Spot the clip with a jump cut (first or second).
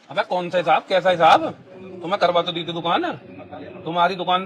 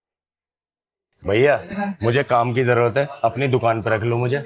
second